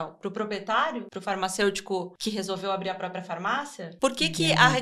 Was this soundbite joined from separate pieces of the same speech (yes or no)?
yes